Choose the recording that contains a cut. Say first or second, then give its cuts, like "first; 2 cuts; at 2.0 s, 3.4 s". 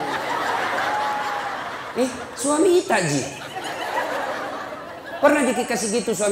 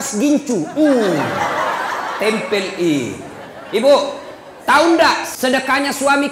second; 1 cut; at 5.3 s